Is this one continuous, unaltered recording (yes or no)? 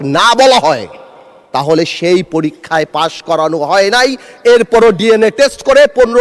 yes